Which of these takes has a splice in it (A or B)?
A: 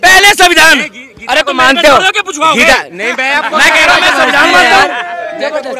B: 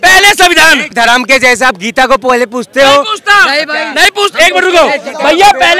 B